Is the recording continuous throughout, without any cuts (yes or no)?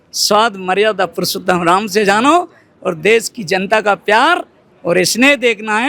yes